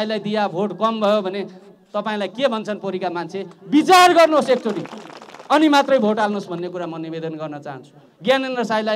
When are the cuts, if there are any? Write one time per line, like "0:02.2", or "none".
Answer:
none